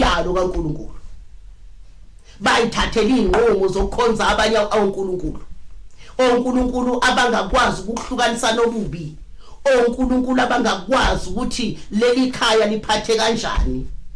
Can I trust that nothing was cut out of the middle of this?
yes; 0 cuts

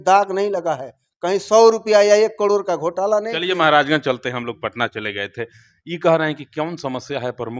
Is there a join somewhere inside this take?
no; 0 cuts

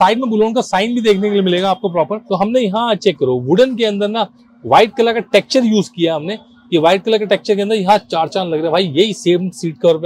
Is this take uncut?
no; 1 cut; at 2.2 s

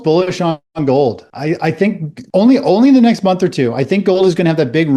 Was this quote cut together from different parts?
yes; 1 cut; at 2.1 s

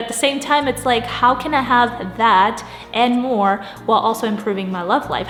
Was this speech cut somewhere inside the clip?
no; 0 cuts

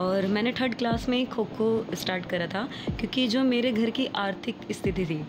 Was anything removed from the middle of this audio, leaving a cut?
no; 0 cuts

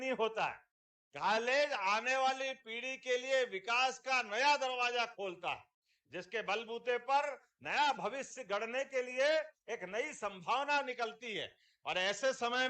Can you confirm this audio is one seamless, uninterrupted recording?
no; 1 cut; at 7.0 s

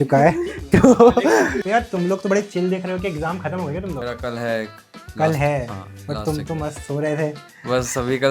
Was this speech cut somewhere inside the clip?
yes; 2 cuts; at 1.6 s, 4.0 s

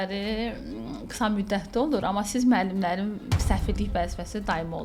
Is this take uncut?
yes; 0 cuts

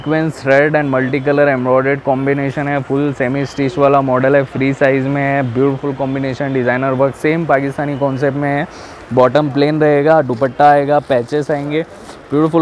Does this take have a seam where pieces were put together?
no; 0 cuts

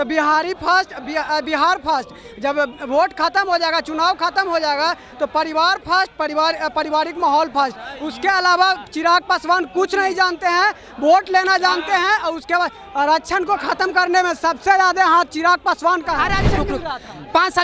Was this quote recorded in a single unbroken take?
no; 1 cut; at 16.5 s

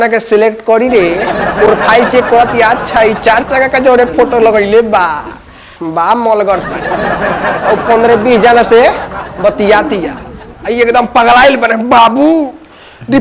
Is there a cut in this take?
no; 0 cuts

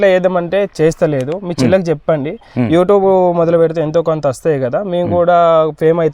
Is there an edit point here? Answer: no; 0 cuts

